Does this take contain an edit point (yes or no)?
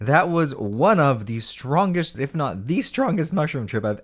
yes